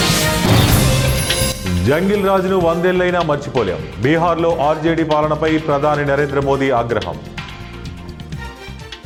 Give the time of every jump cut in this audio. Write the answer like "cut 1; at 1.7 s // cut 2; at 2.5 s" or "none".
none

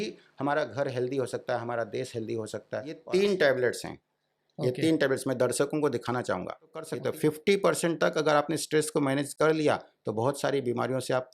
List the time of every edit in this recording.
cut 1; at 3.0 s // cut 2; at 7.0 s

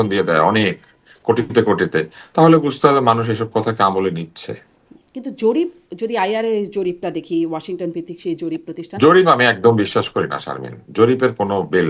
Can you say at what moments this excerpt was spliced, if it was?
none

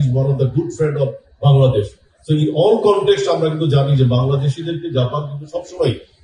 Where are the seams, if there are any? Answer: none

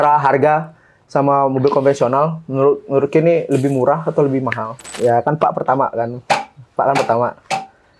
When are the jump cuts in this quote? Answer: cut 1; at 4.9 s

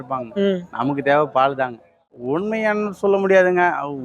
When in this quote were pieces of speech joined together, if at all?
cut 1; at 2.1 s

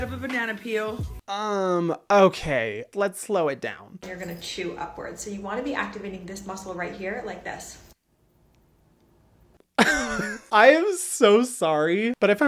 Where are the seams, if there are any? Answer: cut 1; at 1.1 s // cut 2; at 4.0 s // cut 3; at 10.4 s

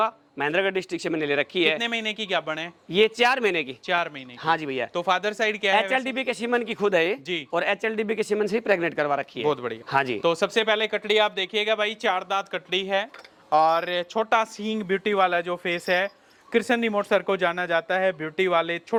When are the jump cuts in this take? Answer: none

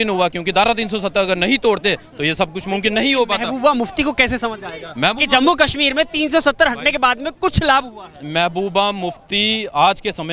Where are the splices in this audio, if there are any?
none

